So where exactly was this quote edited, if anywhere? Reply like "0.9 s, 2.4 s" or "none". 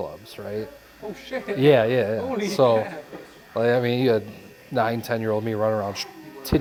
none